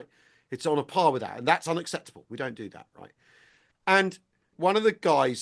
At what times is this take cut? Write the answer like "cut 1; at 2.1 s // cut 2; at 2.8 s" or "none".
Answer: cut 1; at 4.5 s